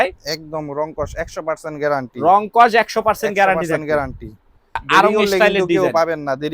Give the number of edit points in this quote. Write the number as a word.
one